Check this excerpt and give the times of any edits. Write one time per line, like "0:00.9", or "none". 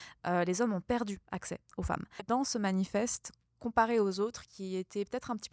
0:02.2